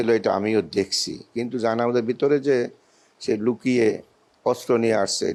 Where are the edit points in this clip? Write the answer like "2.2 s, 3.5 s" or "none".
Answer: none